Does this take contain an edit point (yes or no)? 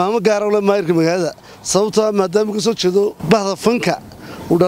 yes